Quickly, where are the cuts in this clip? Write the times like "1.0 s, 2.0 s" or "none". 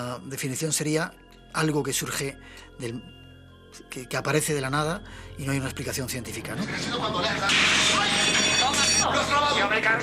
6.7 s